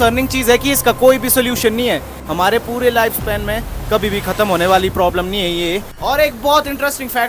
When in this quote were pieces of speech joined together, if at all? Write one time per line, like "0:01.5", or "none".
0:02.2
0:05.9